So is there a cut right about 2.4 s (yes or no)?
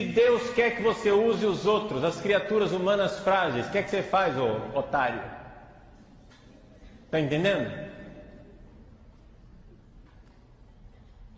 yes